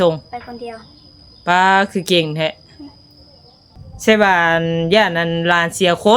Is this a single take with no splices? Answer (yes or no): no